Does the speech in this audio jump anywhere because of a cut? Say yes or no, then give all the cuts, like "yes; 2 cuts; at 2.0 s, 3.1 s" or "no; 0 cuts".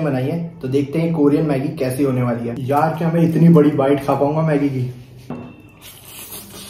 yes; 2 cuts; at 2.5 s, 5.3 s